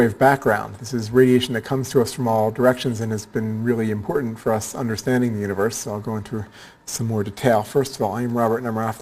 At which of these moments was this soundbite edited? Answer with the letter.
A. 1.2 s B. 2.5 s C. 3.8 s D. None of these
A